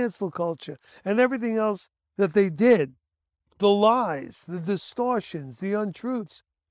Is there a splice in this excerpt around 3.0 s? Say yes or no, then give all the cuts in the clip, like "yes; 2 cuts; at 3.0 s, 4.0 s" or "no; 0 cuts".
no; 0 cuts